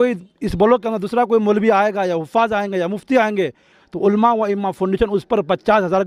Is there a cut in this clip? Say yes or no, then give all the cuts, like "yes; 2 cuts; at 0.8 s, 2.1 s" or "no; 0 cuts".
no; 0 cuts